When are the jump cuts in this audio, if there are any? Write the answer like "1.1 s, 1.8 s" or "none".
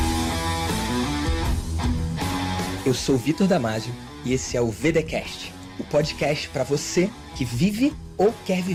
none